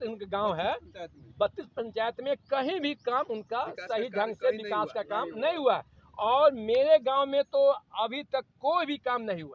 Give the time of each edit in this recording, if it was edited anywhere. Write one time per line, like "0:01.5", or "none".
none